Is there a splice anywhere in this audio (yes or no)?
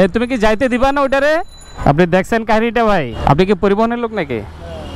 no